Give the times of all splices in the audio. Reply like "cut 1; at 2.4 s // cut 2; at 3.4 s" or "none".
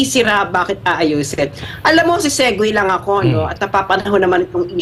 none